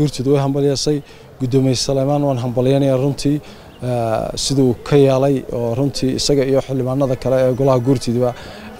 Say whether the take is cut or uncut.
uncut